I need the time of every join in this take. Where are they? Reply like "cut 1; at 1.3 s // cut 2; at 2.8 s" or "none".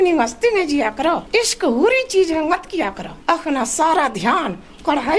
cut 1; at 1.2 s // cut 2; at 3.1 s

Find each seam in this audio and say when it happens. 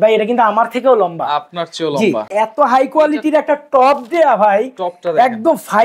cut 1; at 2.3 s

